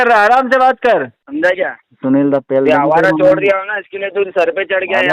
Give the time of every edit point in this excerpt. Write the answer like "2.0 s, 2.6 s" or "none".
1.2 s